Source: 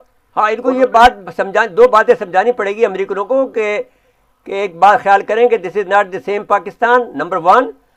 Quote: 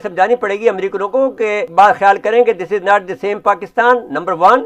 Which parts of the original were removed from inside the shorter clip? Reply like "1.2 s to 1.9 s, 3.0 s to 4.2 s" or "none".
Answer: 3.9 s to 4.7 s